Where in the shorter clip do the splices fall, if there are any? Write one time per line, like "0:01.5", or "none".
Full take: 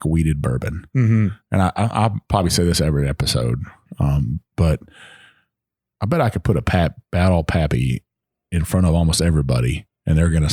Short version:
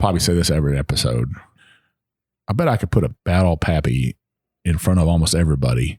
0:01.5
0:03.1

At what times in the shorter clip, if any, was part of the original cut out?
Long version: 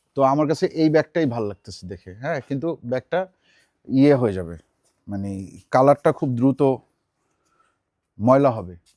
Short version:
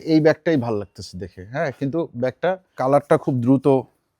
0:02.7

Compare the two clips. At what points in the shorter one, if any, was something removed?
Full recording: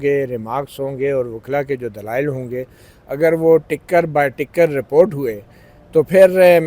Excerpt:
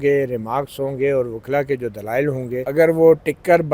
0:02.7

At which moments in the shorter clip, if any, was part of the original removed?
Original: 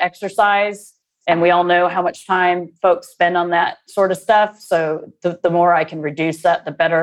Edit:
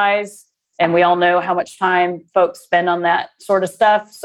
none

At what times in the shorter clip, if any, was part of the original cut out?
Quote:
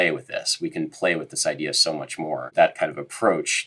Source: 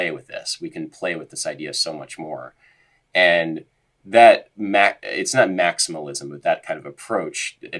0:02.4

